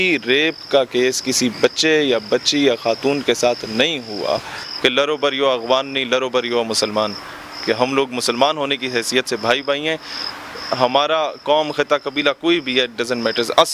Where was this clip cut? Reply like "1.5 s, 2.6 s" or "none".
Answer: 4.7 s